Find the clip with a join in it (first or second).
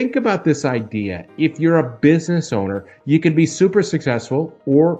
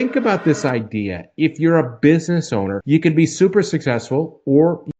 second